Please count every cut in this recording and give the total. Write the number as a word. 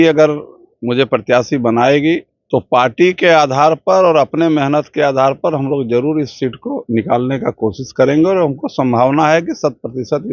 one